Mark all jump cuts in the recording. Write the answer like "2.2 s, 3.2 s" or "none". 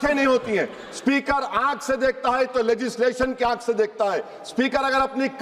none